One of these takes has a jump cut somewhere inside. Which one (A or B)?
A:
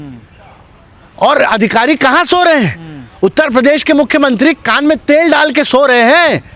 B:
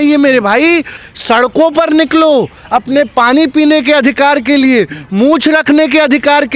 B